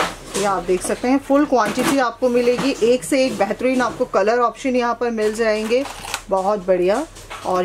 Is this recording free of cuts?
yes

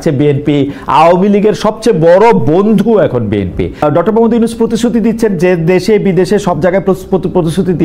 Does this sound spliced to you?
yes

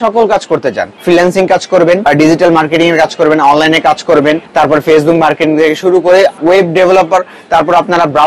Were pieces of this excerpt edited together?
yes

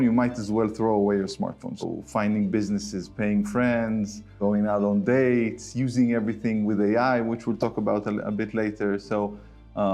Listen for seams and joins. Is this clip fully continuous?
no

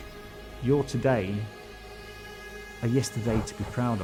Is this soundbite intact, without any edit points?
yes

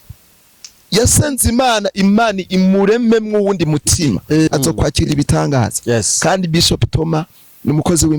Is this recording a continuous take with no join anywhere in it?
no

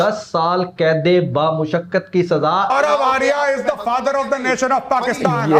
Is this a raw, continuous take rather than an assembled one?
no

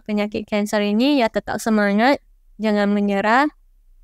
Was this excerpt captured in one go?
yes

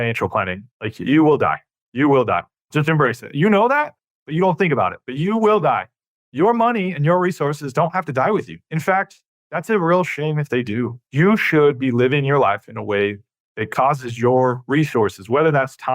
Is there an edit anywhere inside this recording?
yes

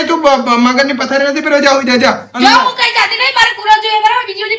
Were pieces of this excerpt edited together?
no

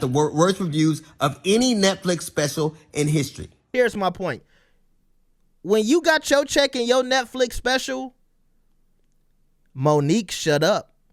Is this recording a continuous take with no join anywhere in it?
no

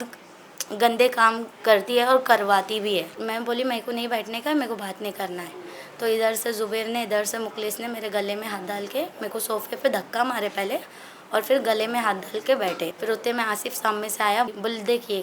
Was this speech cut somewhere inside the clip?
yes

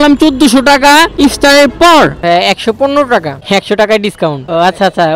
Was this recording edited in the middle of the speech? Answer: yes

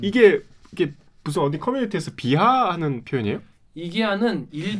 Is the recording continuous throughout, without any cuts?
yes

